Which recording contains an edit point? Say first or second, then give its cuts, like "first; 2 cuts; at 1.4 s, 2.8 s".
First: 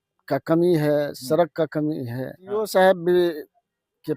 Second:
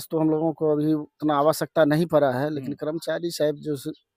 first; 1 cut; at 2.7 s